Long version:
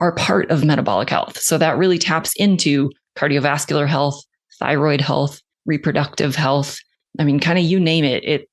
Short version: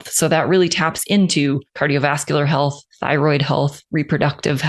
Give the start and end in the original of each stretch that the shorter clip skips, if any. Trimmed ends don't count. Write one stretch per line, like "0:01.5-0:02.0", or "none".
0:03.0-0:03.1
0:04.3-0:04.5
0:05.4-0:05.5